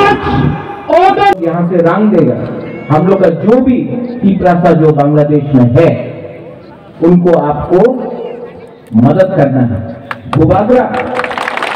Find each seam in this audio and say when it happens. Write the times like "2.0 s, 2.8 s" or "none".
1.4 s